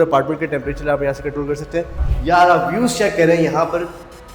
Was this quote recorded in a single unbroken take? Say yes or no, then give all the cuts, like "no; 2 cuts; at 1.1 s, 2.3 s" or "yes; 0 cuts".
no; 1 cut; at 2.0 s